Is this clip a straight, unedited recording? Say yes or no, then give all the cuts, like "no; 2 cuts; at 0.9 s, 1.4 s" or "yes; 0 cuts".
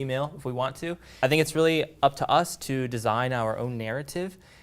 no; 1 cut; at 1.1 s